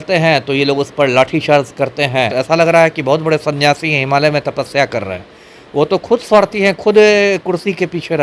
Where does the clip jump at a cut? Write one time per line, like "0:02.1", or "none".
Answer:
0:02.3